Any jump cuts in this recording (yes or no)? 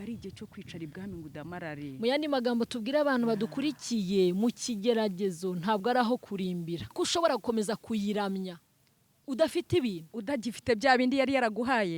yes